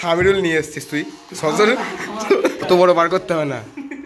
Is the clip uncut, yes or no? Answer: no